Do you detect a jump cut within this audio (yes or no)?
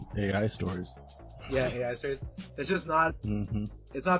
yes